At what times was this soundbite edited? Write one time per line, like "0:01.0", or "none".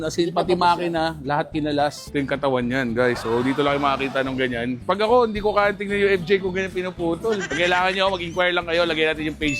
0:02.1
0:04.8
0:07.4